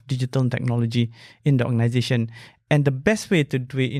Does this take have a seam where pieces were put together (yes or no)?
no